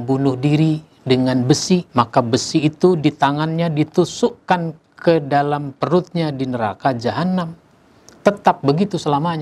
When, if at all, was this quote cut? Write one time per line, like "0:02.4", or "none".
0:01.9